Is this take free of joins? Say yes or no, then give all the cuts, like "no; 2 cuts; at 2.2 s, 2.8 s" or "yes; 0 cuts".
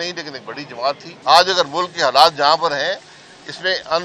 no; 1 cut; at 1.1 s